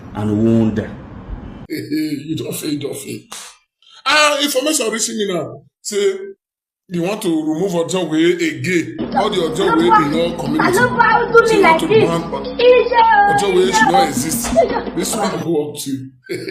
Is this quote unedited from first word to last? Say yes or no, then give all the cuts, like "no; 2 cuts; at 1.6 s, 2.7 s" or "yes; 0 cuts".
no; 1 cut; at 1.5 s